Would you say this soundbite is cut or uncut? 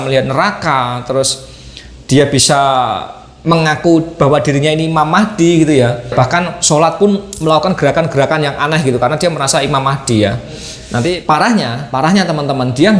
cut